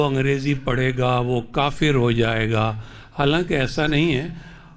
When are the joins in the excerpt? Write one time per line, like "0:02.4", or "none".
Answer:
none